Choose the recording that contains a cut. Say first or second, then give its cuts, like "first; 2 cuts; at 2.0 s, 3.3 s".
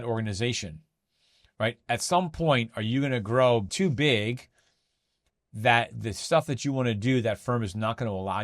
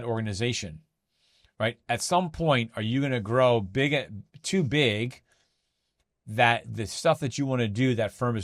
first; 1 cut; at 3.7 s